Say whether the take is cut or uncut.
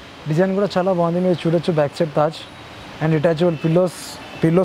uncut